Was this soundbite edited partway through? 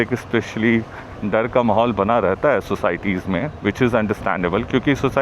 no; 0 cuts

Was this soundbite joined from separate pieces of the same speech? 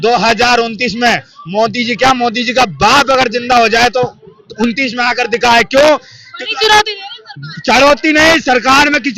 no; 0 cuts

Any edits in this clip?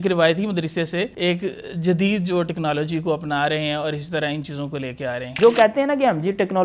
yes; 2 cuts; at 1.1 s, 5.3 s

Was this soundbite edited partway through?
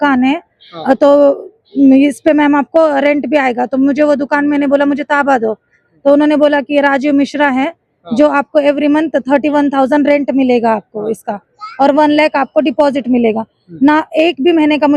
no; 0 cuts

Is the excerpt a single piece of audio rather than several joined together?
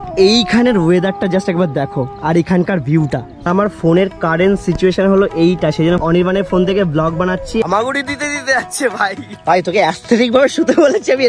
no; 2 cuts; at 3.5 s, 7.6 s

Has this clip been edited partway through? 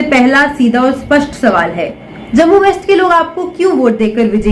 yes; 1 cut; at 2.0 s

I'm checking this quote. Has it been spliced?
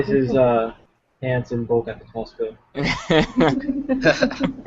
yes; 1 cut; at 2.3 s

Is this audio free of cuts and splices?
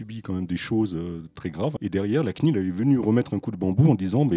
no; 1 cut; at 1.8 s

